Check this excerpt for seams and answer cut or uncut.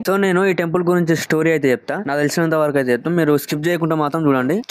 uncut